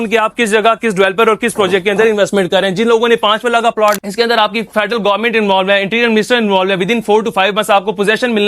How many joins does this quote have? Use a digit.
1